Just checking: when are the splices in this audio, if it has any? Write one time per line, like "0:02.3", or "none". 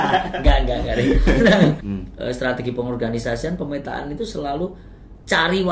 0:01.9